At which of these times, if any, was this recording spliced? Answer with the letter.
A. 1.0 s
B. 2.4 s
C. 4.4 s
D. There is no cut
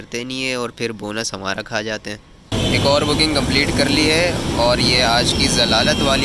B